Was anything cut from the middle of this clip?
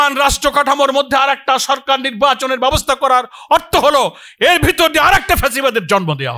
no; 0 cuts

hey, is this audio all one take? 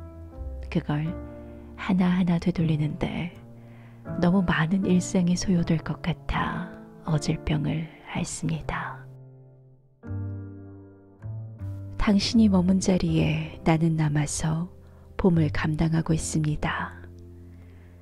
yes; 0 cuts

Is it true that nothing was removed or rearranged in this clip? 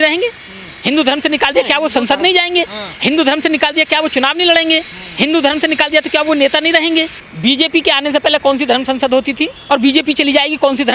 no; 2 cuts; at 7.2 s, 9.5 s

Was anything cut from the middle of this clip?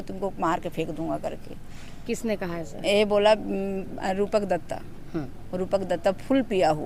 no; 0 cuts

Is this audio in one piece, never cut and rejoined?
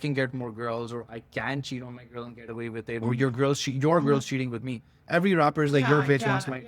yes; 0 cuts

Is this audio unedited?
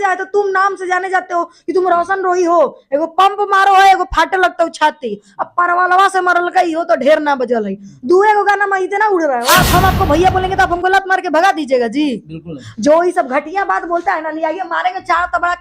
no; 1 cut; at 9.4 s

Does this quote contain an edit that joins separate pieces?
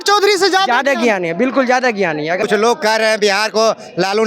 yes; 1 cut; at 2.4 s

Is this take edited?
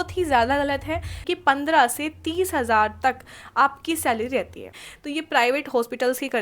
yes; 2 cuts; at 1.2 s, 4.8 s

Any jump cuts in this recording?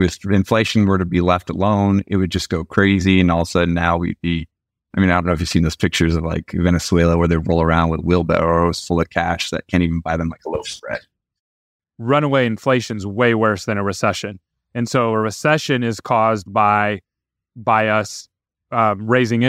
yes; 1 cut; at 11.5 s

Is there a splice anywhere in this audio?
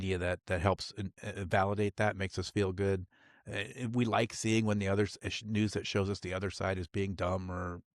no; 0 cuts

